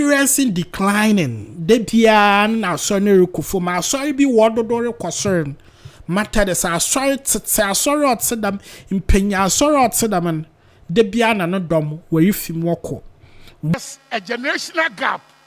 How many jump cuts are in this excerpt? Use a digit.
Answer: 1